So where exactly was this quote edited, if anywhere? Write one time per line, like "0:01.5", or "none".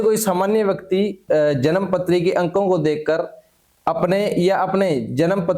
none

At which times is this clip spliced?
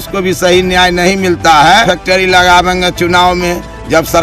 0:01.8

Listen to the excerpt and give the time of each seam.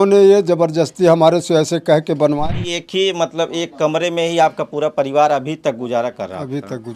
0:02.4

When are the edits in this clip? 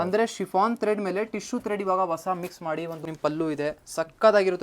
0:03.1

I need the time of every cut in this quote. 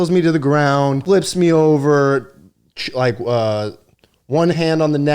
0:01.0

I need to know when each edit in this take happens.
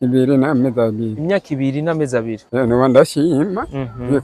0:02.4

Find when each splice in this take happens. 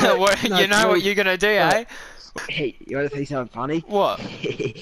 0:02.3

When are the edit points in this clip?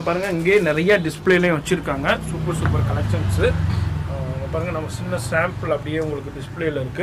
0:04.4

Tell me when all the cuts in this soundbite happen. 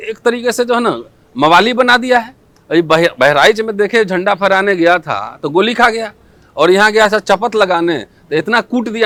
none

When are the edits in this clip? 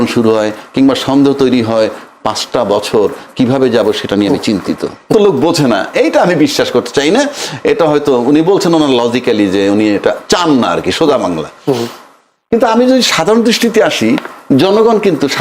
0:05.1

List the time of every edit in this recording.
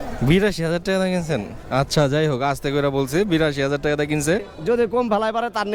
0:04.5

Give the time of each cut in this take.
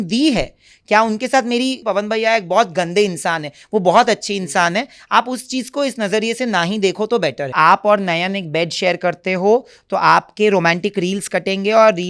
0:01.8
0:07.5

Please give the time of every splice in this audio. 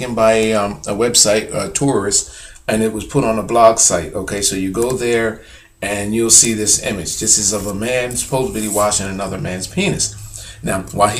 0:09.8

